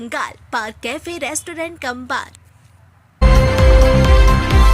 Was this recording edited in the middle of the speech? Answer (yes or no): yes